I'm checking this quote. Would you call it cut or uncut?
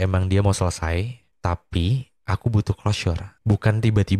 cut